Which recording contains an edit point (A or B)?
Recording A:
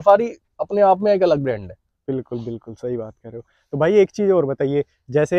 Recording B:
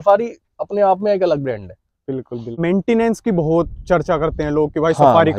B